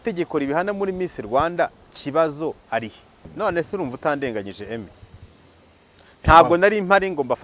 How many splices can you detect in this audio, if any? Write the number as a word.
one